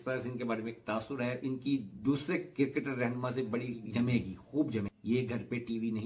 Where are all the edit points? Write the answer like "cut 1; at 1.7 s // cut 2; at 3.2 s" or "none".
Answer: cut 1; at 4.9 s